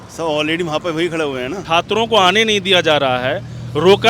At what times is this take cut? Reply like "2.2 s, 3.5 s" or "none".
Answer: 1.6 s